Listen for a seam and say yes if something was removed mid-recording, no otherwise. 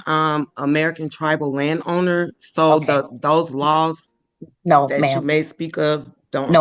no